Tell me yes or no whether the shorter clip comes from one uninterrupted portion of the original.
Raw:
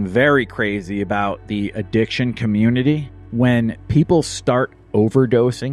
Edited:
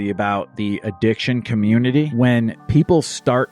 no